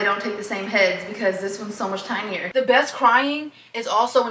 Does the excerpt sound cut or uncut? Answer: cut